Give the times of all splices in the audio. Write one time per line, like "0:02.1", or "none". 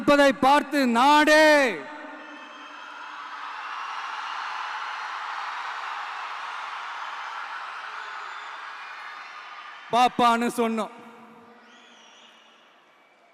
none